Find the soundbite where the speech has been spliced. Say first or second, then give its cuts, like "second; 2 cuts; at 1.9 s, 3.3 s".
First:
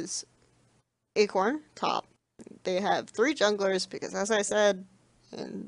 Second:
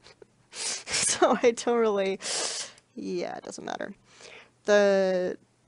second; 1 cut; at 1.5 s